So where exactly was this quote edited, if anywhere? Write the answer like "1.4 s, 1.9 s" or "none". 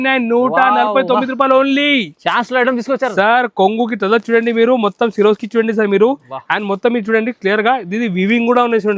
none